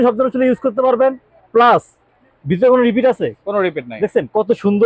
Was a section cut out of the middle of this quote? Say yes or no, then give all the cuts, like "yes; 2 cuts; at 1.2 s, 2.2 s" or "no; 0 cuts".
no; 0 cuts